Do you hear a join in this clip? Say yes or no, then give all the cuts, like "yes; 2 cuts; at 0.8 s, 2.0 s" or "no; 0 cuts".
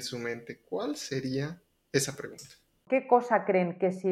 yes; 1 cut; at 2.8 s